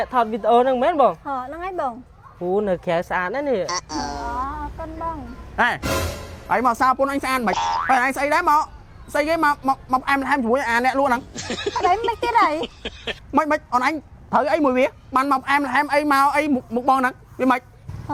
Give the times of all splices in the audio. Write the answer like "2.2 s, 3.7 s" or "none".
none